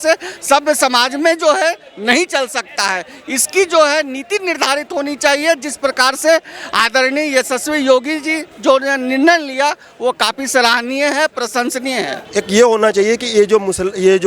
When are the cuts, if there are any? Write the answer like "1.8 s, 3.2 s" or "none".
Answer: 12.2 s